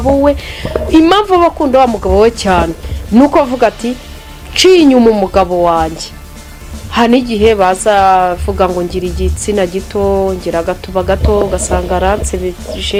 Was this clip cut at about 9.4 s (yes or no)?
no